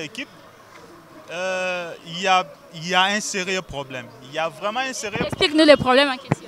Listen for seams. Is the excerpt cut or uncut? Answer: uncut